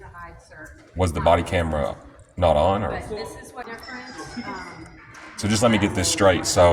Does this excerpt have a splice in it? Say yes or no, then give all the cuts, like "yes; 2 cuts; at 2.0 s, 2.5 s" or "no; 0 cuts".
yes; 1 cut; at 3.6 s